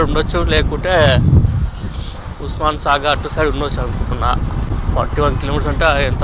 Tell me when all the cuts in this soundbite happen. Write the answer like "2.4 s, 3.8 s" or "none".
none